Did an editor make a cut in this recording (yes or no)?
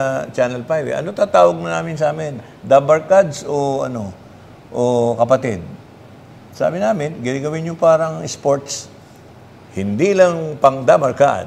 no